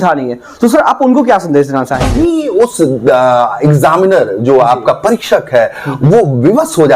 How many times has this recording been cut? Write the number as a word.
one